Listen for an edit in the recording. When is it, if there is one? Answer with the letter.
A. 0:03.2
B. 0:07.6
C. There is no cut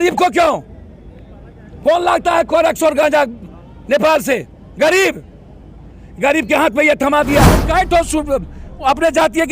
B